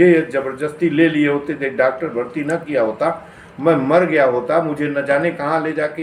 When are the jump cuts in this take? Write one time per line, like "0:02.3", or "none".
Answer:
none

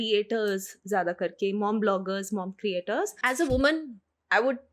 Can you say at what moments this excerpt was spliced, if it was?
0:03.2

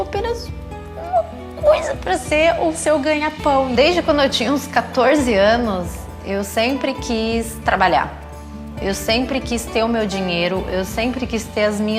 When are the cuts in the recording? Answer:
none

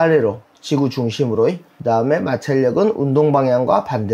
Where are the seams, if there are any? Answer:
0:01.7

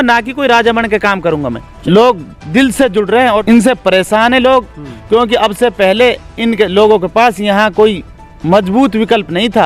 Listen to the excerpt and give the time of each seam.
0:01.8
0:03.4

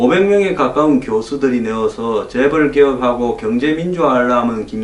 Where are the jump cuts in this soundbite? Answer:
none

